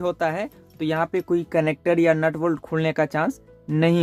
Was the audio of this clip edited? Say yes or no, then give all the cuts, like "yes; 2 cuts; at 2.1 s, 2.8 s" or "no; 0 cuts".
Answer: no; 0 cuts